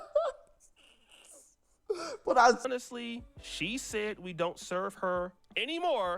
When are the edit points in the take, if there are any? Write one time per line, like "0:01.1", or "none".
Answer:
0:02.6

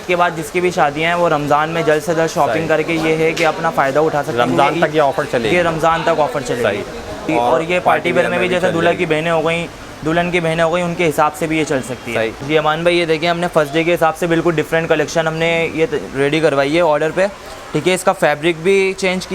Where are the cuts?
0:07.3
0:12.4

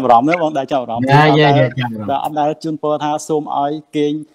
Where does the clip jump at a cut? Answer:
none

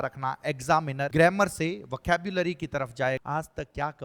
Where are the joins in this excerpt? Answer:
0:01.1
0:03.2

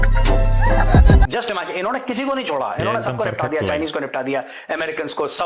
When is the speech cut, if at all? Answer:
0:01.3

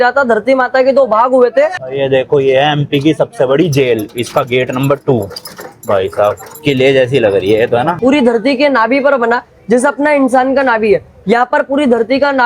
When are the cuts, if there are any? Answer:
0:01.9
0:08.0

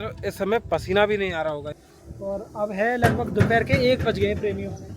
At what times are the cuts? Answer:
0:01.7

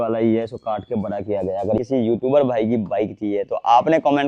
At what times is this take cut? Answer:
0:01.8

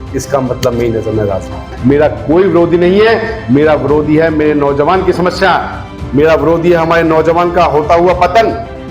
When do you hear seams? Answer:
0:01.7

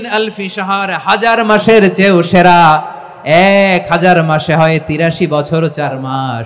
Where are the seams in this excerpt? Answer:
none

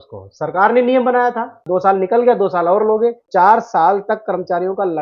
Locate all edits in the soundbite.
0:01.6
0:03.2

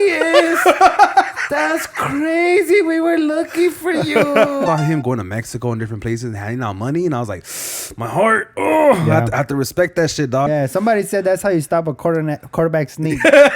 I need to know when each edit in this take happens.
0:04.7
0:10.5

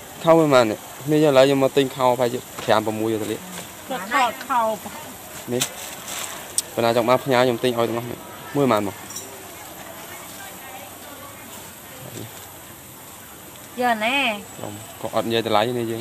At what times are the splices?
none

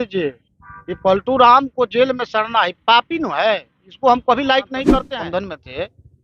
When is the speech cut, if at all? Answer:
0:05.1

